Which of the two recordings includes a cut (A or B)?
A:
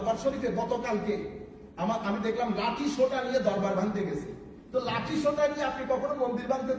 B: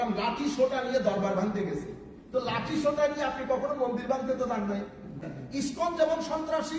B